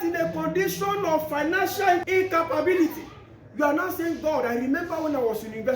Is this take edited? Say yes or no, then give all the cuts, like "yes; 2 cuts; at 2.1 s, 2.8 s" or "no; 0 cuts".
yes; 1 cut; at 2.0 s